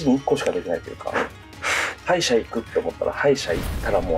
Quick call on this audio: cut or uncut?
cut